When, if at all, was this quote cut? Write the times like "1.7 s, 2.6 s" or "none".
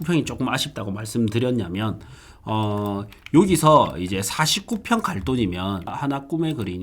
5.9 s